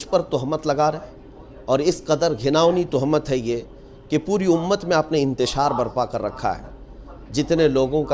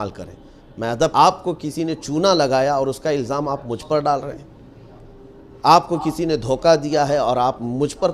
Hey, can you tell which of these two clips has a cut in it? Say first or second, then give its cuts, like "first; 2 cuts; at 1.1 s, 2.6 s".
second; 1 cut; at 1.1 s